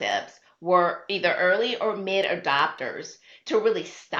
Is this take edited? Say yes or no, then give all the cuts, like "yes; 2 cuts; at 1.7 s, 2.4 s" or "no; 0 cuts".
no; 0 cuts